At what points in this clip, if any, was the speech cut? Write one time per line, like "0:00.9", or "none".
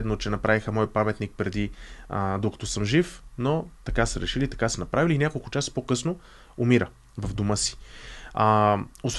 none